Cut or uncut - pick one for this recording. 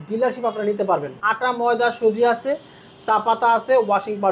cut